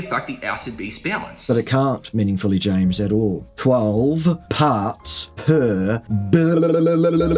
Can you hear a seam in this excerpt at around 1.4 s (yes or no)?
no